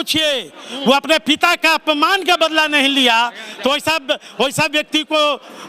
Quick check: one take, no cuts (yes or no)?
yes